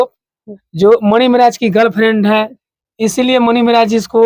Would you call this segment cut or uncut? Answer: uncut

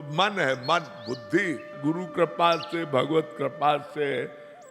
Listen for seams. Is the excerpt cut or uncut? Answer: cut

